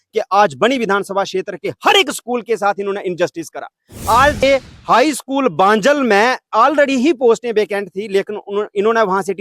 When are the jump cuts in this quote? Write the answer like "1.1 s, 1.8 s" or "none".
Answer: 4.4 s